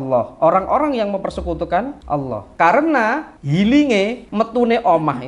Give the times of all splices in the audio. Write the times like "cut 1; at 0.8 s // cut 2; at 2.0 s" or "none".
cut 1; at 2.2 s // cut 2; at 3.3 s // cut 3; at 4.2 s